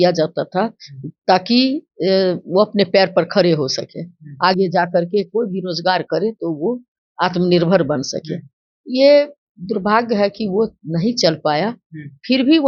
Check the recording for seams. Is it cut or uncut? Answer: uncut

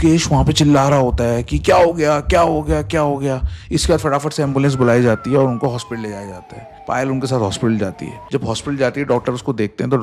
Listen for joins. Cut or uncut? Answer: uncut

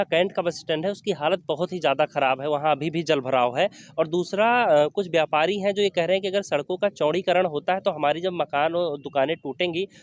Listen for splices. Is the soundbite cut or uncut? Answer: uncut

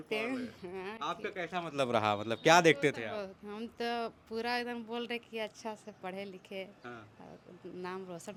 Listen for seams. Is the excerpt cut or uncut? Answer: uncut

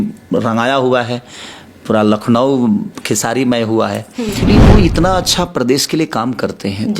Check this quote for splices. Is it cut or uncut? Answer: cut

